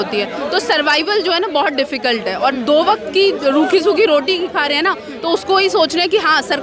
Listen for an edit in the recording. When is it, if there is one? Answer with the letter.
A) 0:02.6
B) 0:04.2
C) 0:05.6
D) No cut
D